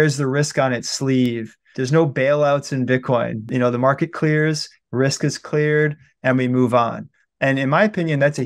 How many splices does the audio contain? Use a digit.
2